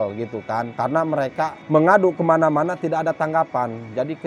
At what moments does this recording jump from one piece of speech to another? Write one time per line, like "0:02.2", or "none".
none

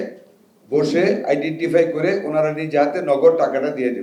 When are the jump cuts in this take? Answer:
none

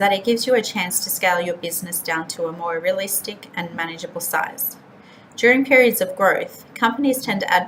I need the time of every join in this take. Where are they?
none

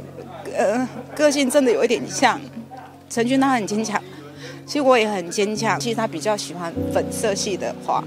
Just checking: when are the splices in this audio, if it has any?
0:05.8

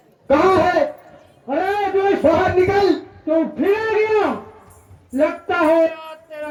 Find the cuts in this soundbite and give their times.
none

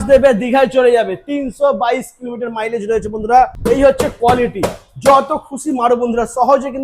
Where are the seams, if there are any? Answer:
0:03.6

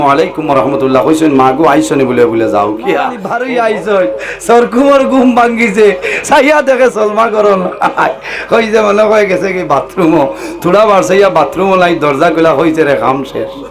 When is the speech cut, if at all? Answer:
0:03.3

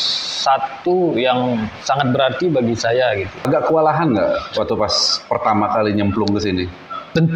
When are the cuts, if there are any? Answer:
0:03.5

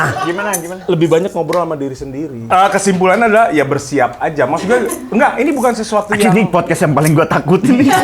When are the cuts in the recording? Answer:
0:02.5

